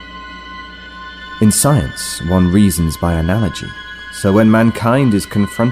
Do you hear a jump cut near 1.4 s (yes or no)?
yes